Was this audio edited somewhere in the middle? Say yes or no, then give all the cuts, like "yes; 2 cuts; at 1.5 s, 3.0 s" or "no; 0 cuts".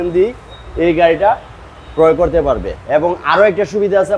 yes; 1 cut; at 2.7 s